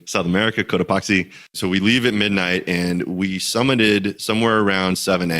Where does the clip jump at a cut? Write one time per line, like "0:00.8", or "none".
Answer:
0:01.6